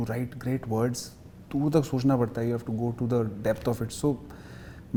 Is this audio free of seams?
yes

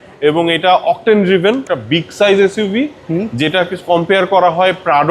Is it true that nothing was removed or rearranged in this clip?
no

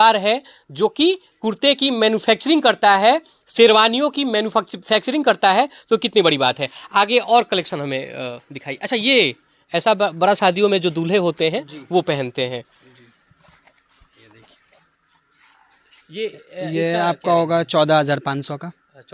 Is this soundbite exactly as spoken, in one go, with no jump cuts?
yes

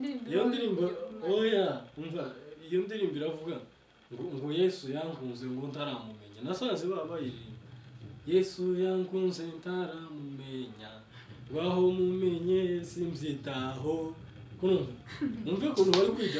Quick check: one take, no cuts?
yes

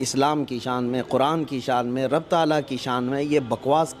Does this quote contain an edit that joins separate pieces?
no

